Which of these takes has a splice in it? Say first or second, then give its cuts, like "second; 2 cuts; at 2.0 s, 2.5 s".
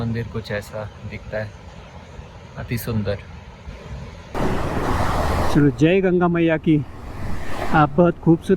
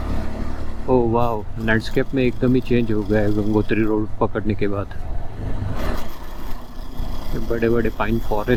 first; 1 cut; at 4.3 s